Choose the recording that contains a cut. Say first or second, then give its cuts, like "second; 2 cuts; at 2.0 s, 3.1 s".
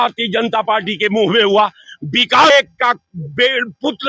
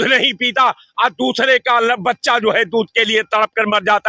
first; 1 cut; at 2.5 s